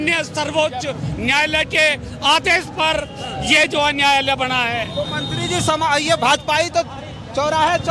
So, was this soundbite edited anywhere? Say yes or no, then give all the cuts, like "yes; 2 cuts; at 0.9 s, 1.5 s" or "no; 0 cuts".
no; 0 cuts